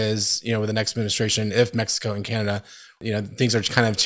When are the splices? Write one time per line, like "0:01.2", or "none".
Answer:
0:03.0